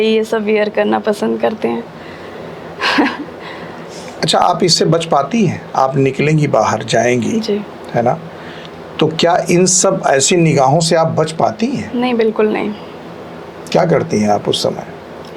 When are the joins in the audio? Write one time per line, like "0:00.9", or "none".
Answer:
none